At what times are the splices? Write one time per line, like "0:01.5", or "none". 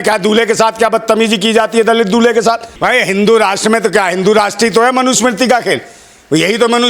0:02.7

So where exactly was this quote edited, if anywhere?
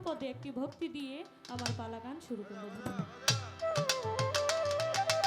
none

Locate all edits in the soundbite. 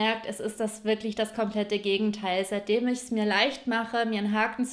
none

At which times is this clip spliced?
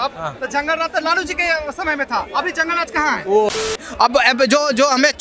0:03.8

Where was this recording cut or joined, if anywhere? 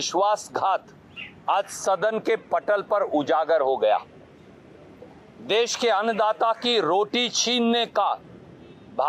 none

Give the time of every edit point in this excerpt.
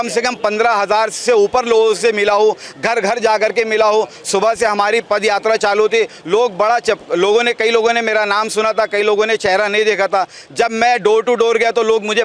none

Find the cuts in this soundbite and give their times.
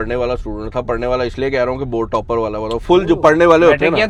none

